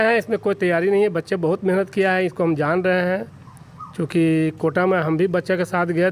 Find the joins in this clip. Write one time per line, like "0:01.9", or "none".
none